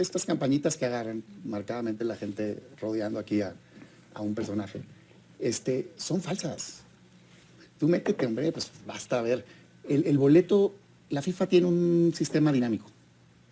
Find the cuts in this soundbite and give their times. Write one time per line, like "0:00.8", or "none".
none